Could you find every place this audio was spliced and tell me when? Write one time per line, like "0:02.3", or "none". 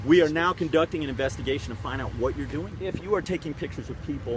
0:02.7